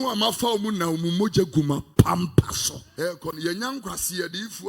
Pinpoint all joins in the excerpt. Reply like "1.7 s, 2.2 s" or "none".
2.8 s